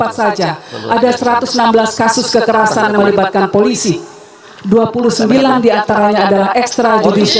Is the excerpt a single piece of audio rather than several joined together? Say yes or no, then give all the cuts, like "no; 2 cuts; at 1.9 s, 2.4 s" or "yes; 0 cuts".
yes; 0 cuts